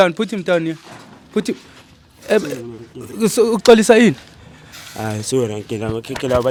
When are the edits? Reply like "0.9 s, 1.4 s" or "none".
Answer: none